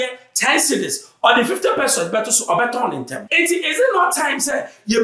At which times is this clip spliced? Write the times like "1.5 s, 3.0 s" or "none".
3.3 s